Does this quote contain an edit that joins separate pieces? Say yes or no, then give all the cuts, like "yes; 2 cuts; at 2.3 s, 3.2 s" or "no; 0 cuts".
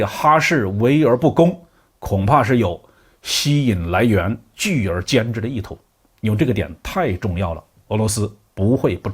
no; 0 cuts